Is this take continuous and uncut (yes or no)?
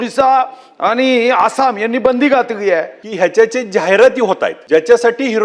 no